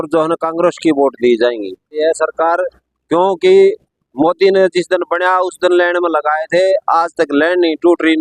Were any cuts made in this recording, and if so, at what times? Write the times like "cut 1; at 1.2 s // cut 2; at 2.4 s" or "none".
cut 1; at 2.0 s